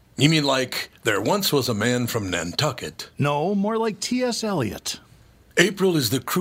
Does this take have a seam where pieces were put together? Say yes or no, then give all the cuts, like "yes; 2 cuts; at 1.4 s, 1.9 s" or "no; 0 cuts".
no; 0 cuts